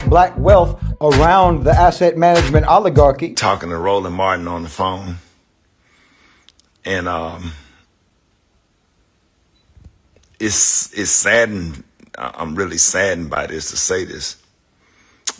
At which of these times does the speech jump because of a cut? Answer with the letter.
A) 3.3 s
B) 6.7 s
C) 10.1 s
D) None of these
A